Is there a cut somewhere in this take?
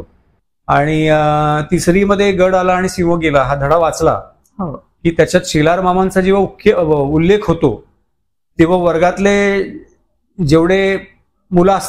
no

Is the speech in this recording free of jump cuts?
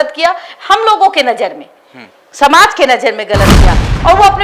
yes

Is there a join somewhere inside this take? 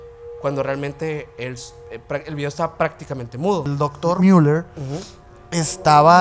yes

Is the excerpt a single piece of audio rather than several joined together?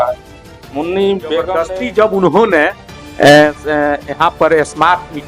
no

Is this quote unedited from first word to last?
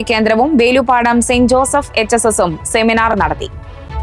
yes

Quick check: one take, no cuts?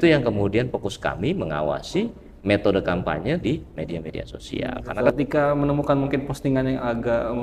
no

